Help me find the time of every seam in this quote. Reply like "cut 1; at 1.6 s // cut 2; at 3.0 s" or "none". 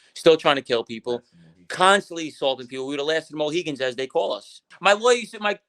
cut 1; at 4.7 s

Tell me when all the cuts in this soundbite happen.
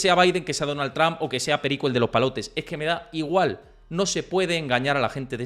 none

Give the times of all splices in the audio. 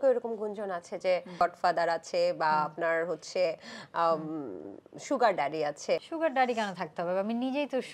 cut 1; at 1.4 s // cut 2; at 6.1 s

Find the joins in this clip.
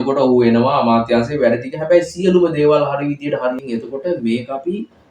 cut 1; at 3.6 s

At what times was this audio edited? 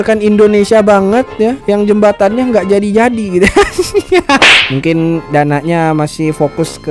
cut 1; at 4.4 s

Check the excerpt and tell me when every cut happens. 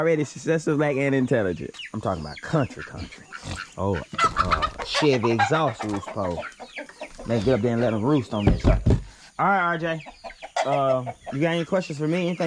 cut 1; at 1.7 s

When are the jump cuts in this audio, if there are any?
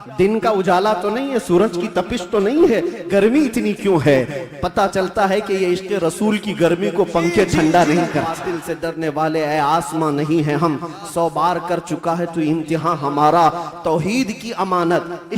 cut 1; at 8.4 s

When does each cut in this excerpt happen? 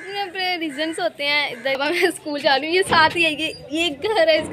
cut 1; at 1.8 s

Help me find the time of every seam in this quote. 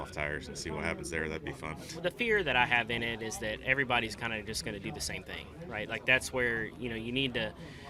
cut 1; at 1.9 s

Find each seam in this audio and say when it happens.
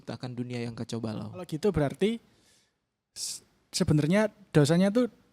cut 1; at 1.5 s

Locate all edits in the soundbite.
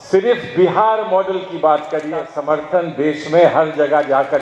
cut 1; at 2.2 s

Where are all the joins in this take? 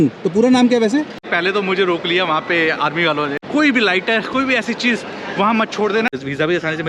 cut 1; at 1.2 s // cut 2; at 3.4 s // cut 3; at 6.1 s

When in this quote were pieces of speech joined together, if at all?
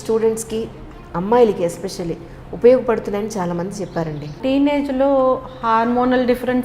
cut 1; at 4.4 s

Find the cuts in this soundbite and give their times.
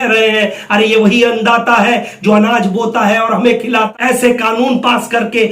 cut 1; at 3.9 s

